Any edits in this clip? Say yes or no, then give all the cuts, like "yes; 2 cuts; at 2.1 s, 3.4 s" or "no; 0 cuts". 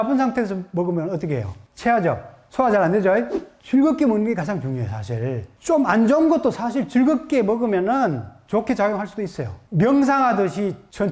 yes; 1 cut; at 9.6 s